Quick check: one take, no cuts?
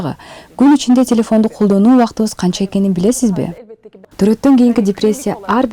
no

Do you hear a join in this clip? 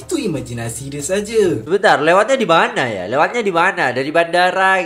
yes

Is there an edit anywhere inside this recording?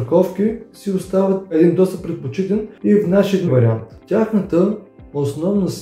yes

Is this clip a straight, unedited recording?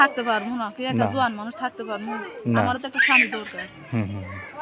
yes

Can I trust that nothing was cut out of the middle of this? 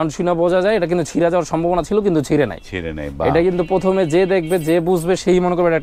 yes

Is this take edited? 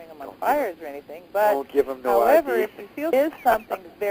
no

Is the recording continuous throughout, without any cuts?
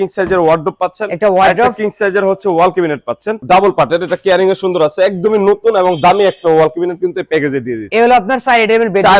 yes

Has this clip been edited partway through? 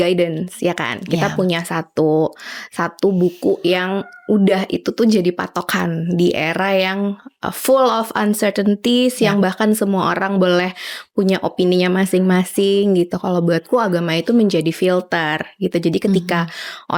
no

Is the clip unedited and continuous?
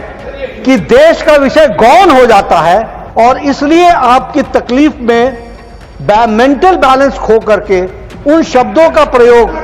no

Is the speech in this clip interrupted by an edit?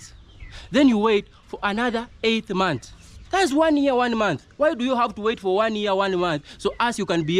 no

